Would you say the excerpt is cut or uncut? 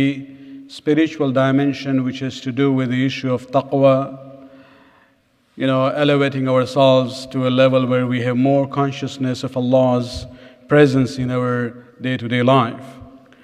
cut